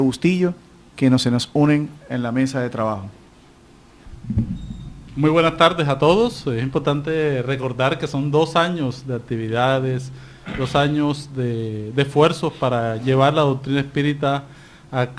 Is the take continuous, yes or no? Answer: no